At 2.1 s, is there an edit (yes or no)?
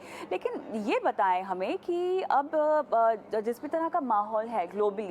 no